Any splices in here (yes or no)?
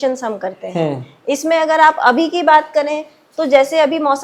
no